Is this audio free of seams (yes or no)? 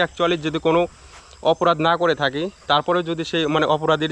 yes